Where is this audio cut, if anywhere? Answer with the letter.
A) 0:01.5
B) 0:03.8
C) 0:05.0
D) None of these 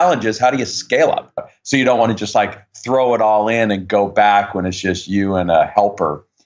A